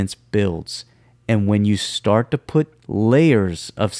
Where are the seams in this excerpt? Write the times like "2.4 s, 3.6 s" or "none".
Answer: 2.8 s